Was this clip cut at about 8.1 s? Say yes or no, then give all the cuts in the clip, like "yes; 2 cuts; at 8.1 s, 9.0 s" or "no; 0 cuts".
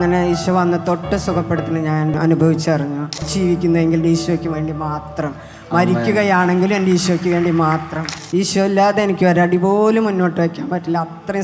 yes; 3 cuts; at 2.2 s, 3.3 s, 8.1 s